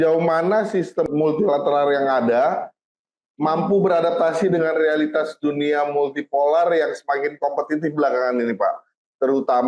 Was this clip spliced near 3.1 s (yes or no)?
no